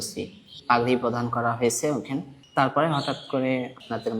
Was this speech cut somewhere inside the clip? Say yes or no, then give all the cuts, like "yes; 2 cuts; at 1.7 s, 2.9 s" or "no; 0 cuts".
yes; 1 cut; at 2.4 s